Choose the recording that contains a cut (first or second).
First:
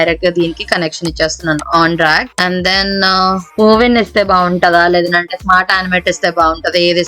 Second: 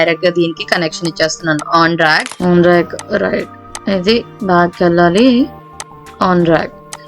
second